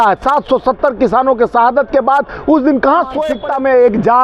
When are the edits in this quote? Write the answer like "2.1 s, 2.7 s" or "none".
3.3 s